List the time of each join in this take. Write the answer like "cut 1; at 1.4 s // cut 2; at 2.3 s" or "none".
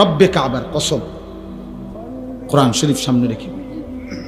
cut 1; at 3.4 s